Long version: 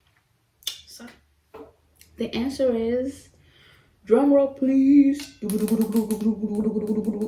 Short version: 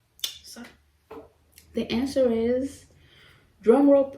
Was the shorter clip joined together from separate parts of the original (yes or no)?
no